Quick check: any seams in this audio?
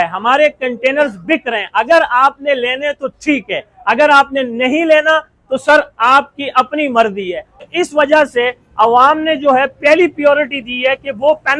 no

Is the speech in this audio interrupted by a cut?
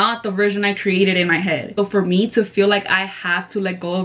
yes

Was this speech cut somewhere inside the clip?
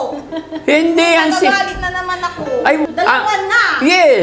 yes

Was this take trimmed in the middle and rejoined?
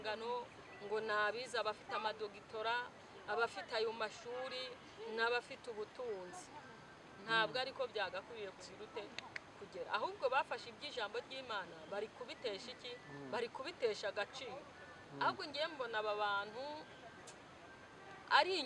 no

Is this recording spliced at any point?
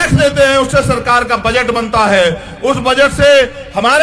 no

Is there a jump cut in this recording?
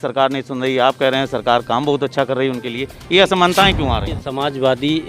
yes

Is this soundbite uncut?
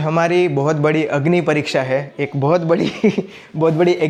yes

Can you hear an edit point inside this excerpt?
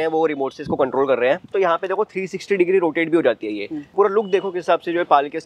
yes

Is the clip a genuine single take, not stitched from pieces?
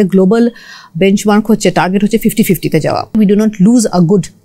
no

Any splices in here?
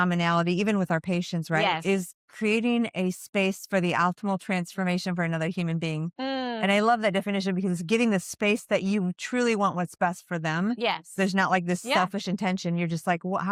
no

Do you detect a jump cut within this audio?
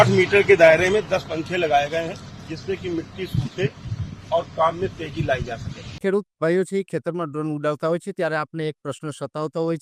no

